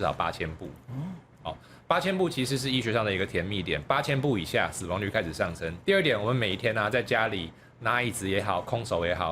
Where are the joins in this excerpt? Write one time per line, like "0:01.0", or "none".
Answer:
0:05.8